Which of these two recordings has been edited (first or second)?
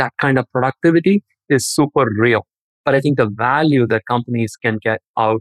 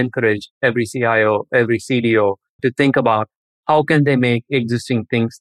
first